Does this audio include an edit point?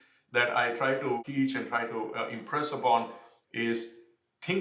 yes; 1 cut; at 1.2 s

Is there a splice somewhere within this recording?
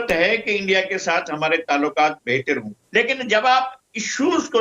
no; 0 cuts

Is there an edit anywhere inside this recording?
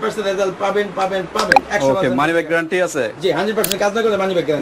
no; 0 cuts

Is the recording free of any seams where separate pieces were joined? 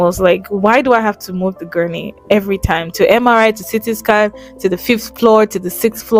yes; 0 cuts

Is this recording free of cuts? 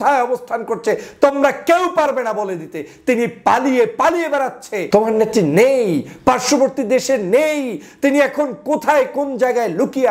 no; 1 cut; at 4.7 s

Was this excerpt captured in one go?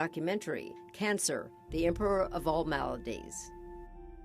no; 1 cut; at 3.2 s

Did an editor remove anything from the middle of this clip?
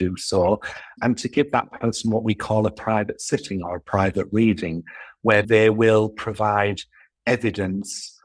yes; 2 cuts; at 0.9 s, 5.5 s

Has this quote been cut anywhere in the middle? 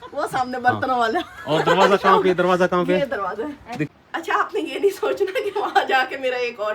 yes; 1 cut; at 3.8 s

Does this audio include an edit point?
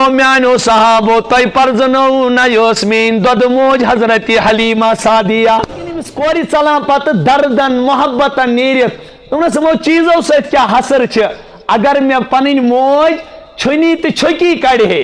yes; 1 cut; at 6.1 s

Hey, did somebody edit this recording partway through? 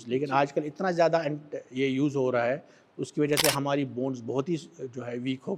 no; 0 cuts

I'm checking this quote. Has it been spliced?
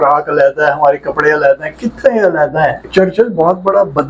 yes; 1 cut; at 2.8 s

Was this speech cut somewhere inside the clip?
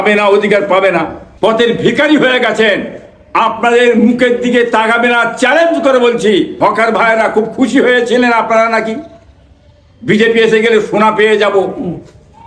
yes; 2 cuts; at 1.2 s, 6.5 s

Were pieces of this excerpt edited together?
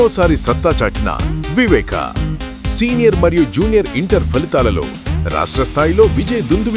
no; 0 cuts

